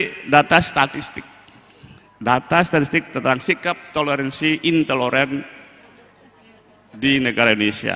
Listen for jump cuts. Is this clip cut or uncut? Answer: uncut